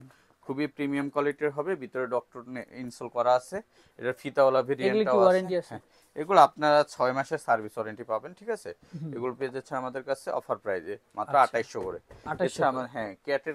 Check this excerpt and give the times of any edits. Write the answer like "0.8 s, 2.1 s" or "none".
none